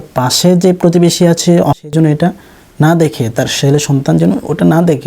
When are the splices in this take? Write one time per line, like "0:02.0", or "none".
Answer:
0:01.8